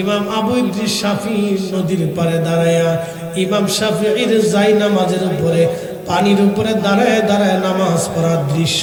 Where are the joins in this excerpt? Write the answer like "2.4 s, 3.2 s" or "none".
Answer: none